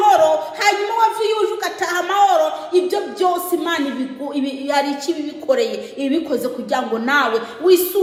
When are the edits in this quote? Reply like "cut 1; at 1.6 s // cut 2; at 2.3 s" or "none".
none